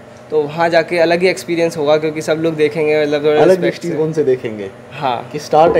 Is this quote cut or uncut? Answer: uncut